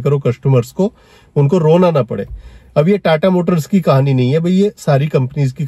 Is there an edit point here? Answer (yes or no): no